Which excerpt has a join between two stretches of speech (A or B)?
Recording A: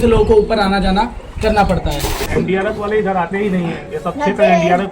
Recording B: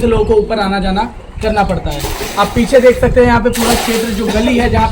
A